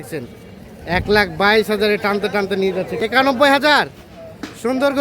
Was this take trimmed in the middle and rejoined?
yes; 1 cut; at 2.9 s

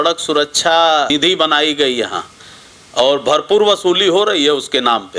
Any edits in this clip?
yes; 1 cut; at 1.1 s

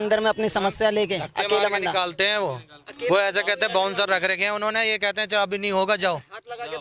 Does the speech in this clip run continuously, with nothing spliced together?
yes; 0 cuts

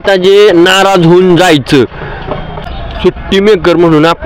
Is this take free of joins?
no; 1 cut; at 2.7 s

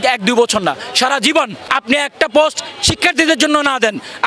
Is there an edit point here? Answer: yes; 1 cut; at 1.6 s

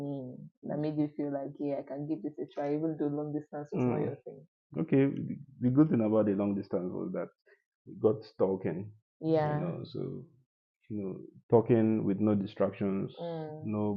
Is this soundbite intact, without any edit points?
yes; 0 cuts

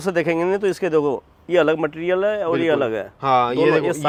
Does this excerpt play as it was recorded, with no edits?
yes; 0 cuts

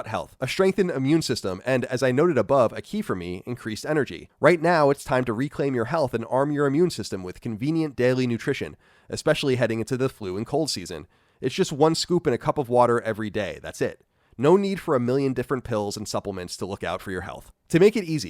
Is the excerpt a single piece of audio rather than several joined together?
no; 1 cut; at 4.2 s

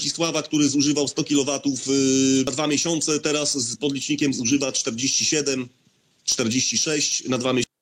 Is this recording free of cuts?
yes; 0 cuts

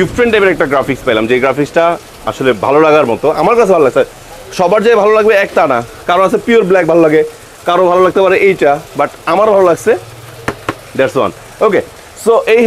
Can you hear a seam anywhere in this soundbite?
no; 0 cuts

